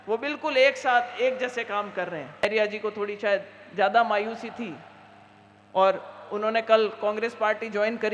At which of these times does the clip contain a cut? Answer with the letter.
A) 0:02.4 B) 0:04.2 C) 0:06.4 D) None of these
A